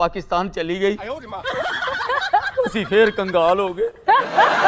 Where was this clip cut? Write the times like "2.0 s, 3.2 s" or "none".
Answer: none